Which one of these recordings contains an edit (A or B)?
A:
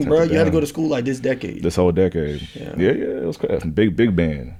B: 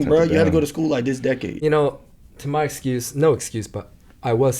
B